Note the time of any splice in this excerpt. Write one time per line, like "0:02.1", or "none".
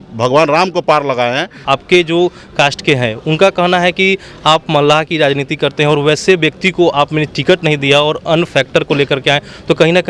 0:01.6